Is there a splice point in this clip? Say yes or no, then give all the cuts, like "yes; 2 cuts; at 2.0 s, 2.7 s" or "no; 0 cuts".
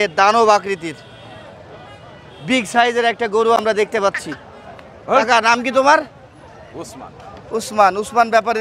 no; 0 cuts